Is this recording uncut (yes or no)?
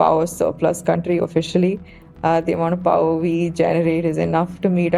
yes